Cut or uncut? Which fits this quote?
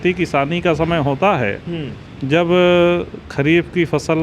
uncut